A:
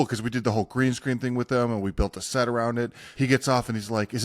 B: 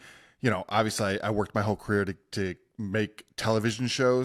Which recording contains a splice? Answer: A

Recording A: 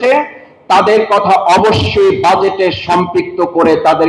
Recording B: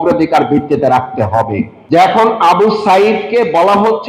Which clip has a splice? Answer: B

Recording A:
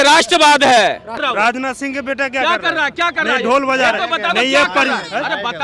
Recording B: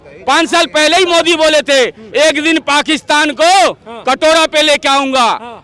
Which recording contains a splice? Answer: A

